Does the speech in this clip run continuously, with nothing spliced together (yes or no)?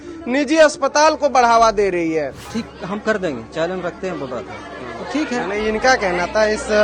no